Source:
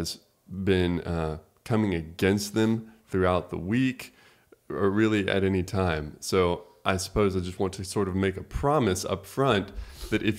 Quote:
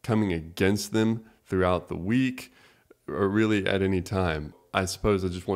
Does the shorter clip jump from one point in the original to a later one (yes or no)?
yes